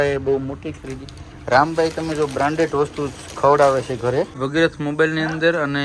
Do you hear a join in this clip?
yes; 1 cut; at 4.4 s

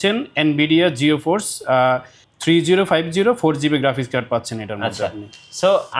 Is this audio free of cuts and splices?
yes; 0 cuts

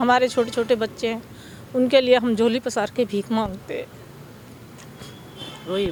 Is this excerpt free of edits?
yes; 0 cuts

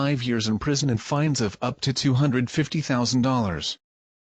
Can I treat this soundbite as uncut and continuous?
yes; 0 cuts

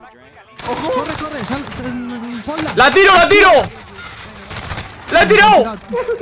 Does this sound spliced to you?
no; 0 cuts

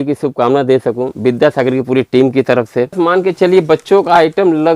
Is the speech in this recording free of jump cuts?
no; 1 cut; at 2.9 s

